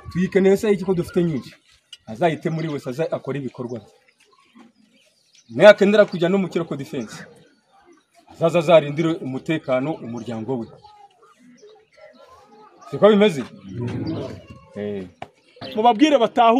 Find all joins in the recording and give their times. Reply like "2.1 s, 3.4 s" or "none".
15.6 s